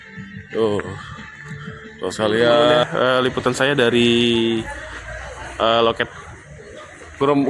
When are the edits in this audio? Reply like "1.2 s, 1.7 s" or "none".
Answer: 2.8 s